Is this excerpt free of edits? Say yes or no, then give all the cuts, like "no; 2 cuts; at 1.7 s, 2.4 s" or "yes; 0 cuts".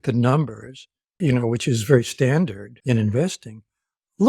no; 2 cuts; at 1.2 s, 2.7 s